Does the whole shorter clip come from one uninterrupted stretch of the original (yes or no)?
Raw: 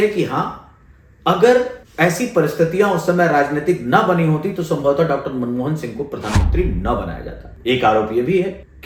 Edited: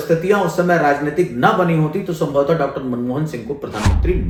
yes